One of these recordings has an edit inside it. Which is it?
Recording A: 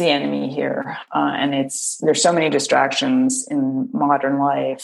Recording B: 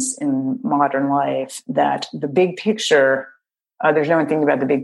A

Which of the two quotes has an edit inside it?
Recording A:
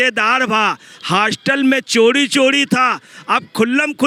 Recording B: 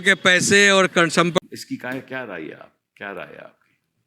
B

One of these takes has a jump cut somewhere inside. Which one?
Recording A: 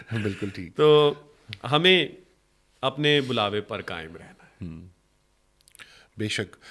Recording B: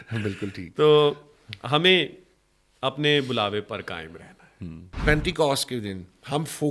B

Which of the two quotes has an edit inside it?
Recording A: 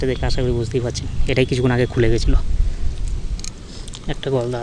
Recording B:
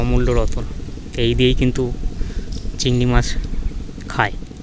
A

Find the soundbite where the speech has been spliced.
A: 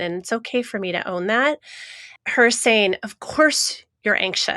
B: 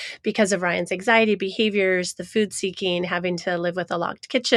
A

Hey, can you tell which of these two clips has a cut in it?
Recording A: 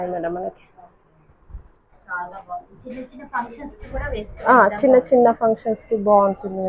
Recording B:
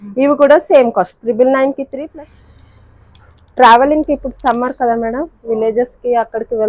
B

